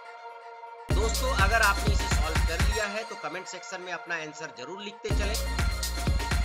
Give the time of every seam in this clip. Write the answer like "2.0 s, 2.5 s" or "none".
none

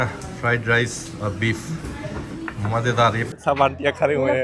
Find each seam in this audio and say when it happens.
3.3 s

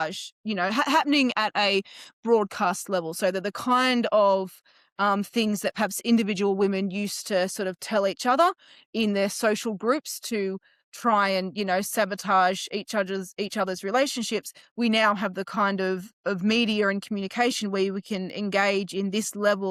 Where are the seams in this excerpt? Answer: none

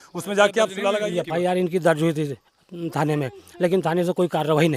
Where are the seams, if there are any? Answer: 1.0 s

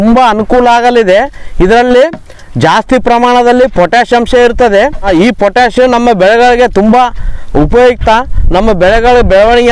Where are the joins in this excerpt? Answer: 5.1 s

